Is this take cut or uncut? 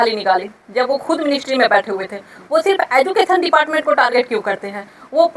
uncut